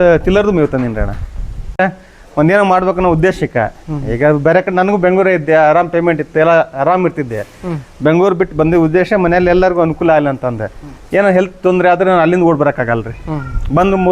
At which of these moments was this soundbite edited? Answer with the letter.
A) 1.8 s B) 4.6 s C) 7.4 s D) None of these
A